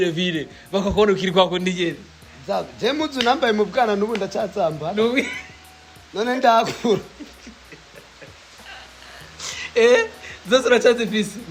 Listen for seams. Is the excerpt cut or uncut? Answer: uncut